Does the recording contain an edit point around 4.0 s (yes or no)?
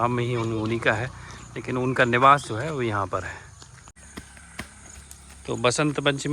yes